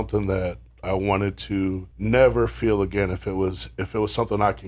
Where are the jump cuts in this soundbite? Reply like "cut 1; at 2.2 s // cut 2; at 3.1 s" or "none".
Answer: cut 1; at 1.9 s